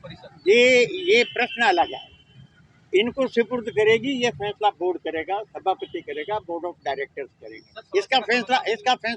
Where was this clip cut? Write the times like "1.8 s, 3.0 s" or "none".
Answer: none